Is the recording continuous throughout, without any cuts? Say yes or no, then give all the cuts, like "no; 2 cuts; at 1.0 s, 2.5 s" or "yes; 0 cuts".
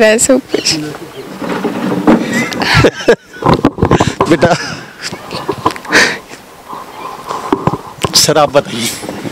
yes; 0 cuts